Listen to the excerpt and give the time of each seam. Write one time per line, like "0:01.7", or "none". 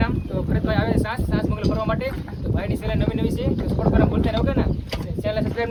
none